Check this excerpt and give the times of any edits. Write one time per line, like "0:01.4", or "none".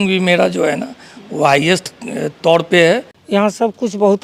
0:03.1